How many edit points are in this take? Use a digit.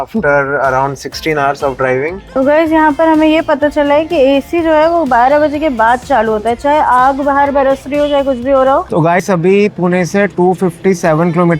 2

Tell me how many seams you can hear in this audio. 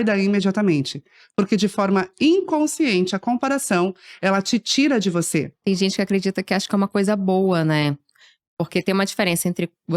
1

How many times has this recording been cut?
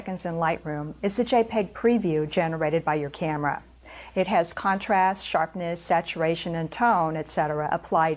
0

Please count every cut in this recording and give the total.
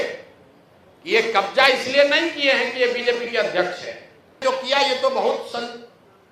1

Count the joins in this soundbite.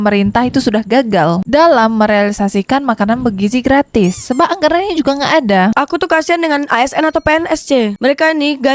2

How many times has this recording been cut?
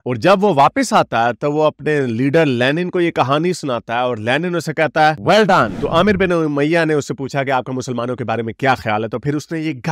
1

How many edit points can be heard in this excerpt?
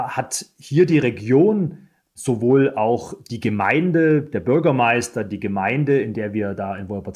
0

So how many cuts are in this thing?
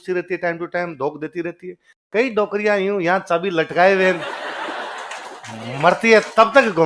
0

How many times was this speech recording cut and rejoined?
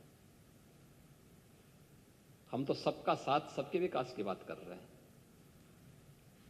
0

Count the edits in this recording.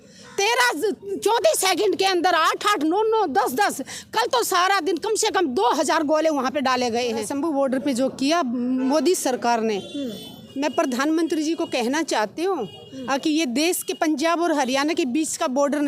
1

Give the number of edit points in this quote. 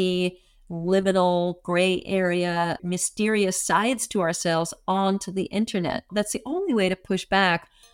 1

